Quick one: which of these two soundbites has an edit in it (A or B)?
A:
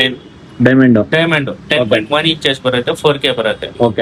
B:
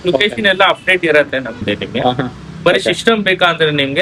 B